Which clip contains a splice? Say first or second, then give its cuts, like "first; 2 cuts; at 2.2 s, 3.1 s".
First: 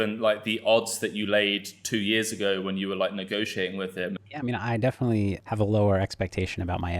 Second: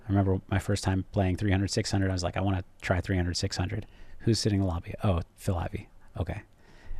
first; 2 cuts; at 4.2 s, 5.4 s